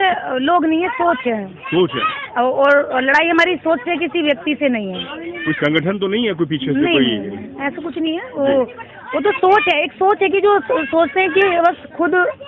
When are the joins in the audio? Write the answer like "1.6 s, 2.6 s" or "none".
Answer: none

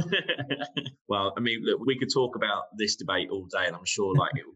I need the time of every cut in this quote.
0.9 s, 1.8 s

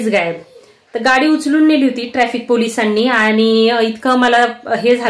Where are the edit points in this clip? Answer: none

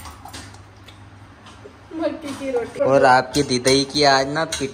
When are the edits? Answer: 2.8 s

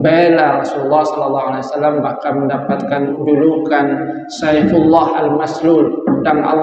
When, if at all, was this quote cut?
3.1 s

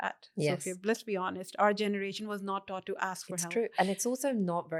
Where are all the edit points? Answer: none

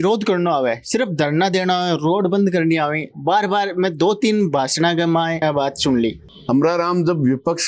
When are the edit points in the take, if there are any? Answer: 5.4 s, 6.3 s

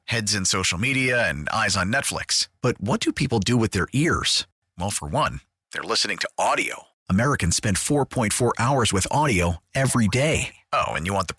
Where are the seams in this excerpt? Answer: none

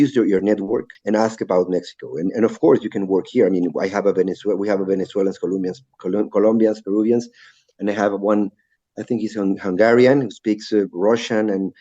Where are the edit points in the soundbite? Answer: 0.9 s

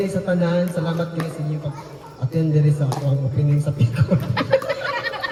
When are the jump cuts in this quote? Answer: none

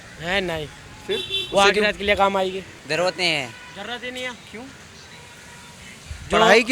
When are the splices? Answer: 2.7 s

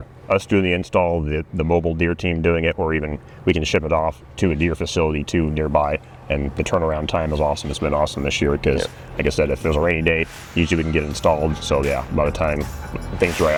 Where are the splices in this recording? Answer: none

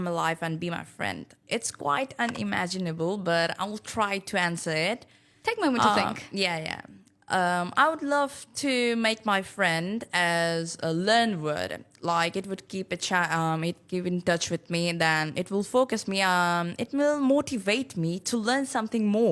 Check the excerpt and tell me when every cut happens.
none

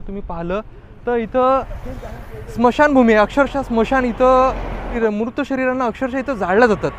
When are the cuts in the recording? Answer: 5.0 s

